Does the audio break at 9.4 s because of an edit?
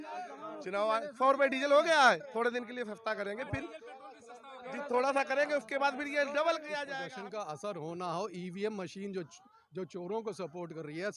no; 1 cut; at 6.8 s

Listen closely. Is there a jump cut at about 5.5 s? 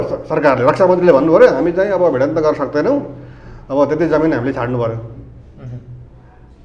no; 0 cuts

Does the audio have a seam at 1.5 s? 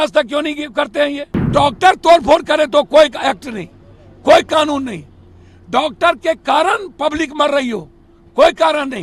yes; 1 cut; at 1.5 s

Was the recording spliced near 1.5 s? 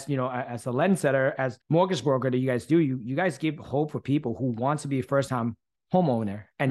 yes; 1 cut; at 1.5 s

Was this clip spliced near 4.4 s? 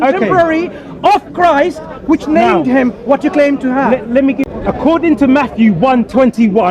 yes; 1 cut; at 4.4 s

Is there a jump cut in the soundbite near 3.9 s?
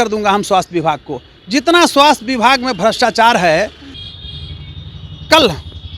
yes; 1 cut; at 3.9 s

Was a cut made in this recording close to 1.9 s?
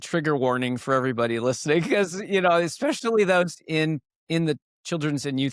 no; 0 cuts

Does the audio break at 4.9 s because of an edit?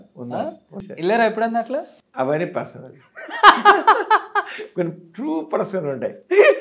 no; 2 cuts; at 0.8 s, 2.0 s

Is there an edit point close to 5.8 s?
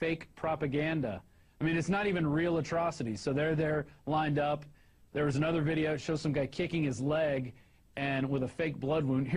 no; 0 cuts

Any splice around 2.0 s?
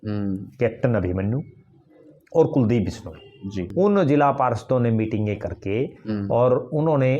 no; 1 cut; at 3.6 s

